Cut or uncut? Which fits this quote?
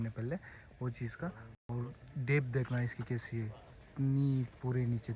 uncut